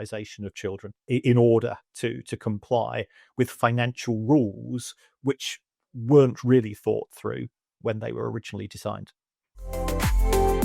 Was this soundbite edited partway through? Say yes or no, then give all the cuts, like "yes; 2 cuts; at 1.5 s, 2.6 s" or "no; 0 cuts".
yes; 2 cuts; at 1.1 s, 9.4 s